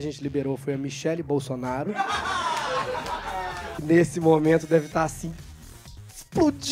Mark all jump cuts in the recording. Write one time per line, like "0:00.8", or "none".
0:03.8